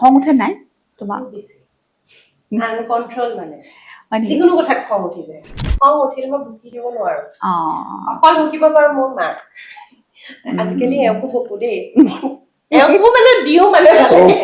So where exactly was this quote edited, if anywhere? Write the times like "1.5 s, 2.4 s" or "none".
5.7 s